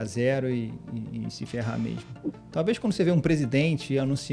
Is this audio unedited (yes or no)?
yes